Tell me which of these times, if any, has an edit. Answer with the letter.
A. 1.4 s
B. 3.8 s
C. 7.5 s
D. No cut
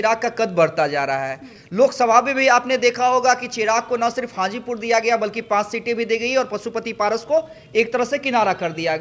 D